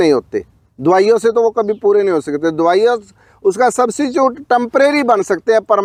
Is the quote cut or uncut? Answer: uncut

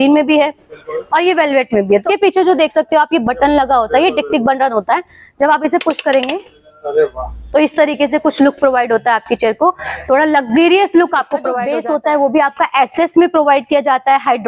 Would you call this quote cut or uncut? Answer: cut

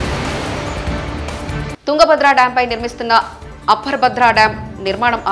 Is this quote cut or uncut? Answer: cut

